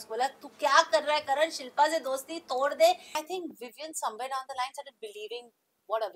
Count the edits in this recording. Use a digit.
1